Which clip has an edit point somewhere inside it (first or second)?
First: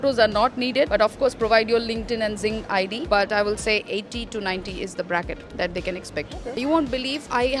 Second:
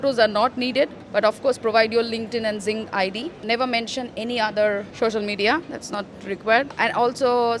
first